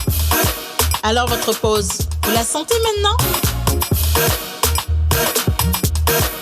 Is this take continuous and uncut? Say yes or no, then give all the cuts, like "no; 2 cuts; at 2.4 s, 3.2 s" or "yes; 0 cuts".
no; 1 cut; at 1.0 s